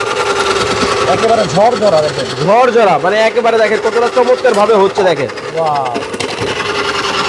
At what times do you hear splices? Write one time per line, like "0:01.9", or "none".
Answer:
none